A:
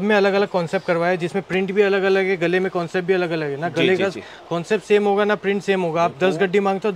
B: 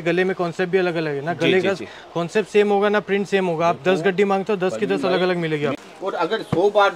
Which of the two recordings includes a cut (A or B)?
B